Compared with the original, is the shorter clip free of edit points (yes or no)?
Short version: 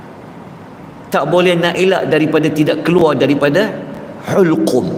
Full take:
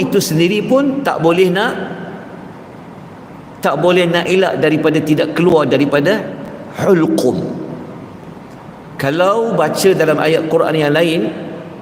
yes